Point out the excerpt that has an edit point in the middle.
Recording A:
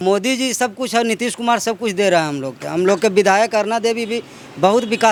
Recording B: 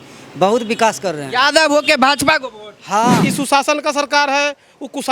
B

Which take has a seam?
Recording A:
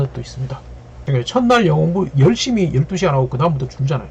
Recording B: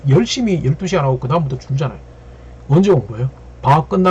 A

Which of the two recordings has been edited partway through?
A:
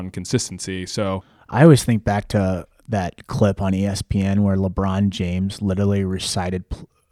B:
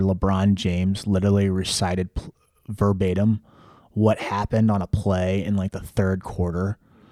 A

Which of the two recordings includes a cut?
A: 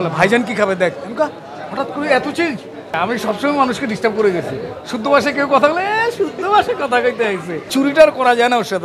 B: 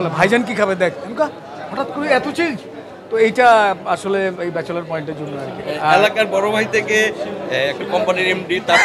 A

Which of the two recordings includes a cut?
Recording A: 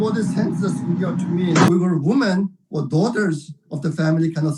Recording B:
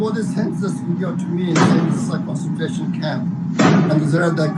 A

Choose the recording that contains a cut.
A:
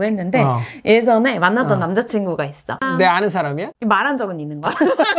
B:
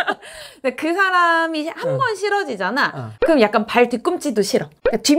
A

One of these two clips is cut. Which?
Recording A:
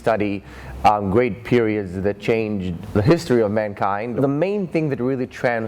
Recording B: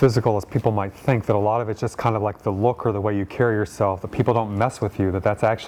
A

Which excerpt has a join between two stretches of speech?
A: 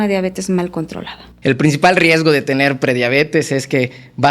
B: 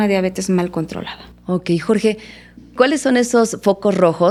A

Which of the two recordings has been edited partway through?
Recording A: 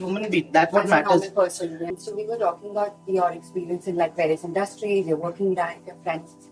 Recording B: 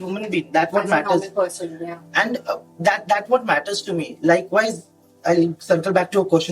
A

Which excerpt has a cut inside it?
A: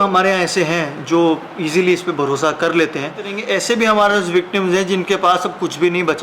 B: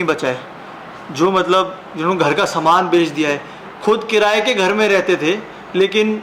A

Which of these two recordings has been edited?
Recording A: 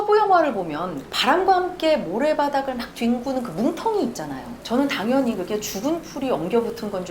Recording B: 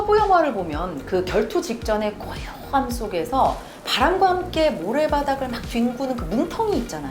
A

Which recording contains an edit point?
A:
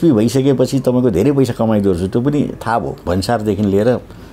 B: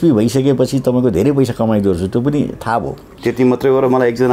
A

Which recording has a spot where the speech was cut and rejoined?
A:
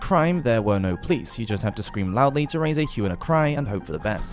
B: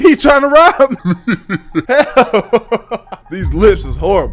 B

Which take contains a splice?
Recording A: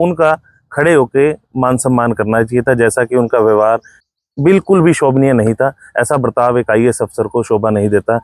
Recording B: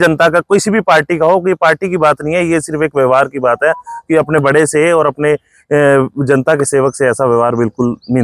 A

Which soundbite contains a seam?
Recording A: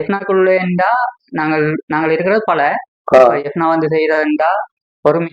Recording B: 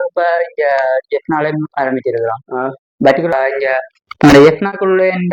B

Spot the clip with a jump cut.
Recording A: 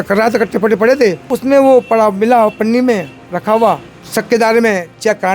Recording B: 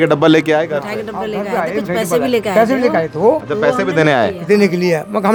A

